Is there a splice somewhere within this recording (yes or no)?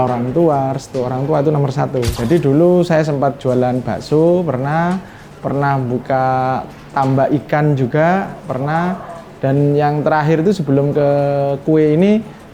yes